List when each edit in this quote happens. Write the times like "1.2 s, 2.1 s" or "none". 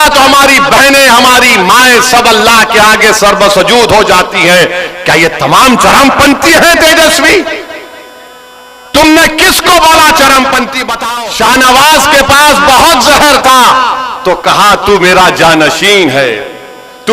10.9 s